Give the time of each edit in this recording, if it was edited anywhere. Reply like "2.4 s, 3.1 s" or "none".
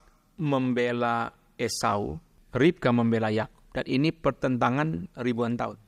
2.3 s